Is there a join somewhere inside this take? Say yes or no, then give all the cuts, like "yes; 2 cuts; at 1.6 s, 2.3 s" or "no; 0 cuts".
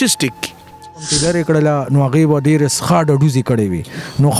yes; 1 cut; at 1.1 s